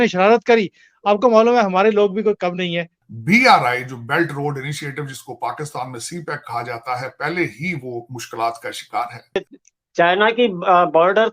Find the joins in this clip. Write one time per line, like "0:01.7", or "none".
0:03.2
0:09.5